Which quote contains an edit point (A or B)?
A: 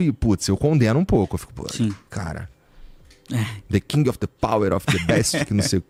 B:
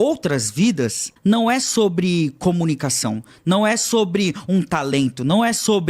B